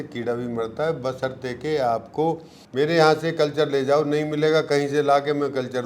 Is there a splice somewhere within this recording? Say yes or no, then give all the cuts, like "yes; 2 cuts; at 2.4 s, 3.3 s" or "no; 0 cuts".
yes; 1 cut; at 2.5 s